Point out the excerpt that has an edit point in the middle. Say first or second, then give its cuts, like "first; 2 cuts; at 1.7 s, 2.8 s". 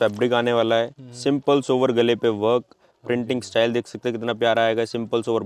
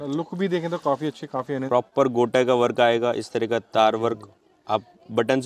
second; 1 cut; at 1.6 s